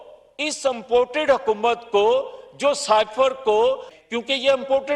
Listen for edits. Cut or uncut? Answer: cut